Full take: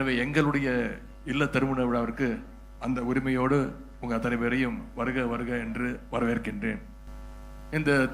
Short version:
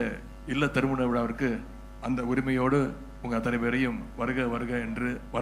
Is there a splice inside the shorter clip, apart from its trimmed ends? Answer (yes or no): no